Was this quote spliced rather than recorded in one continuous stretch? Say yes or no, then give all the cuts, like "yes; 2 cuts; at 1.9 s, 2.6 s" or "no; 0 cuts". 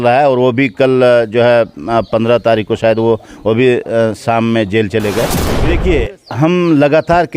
yes; 1 cut; at 5.5 s